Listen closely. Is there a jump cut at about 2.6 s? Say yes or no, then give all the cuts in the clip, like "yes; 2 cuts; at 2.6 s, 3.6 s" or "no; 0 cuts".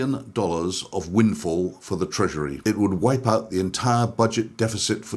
yes; 1 cut; at 2.6 s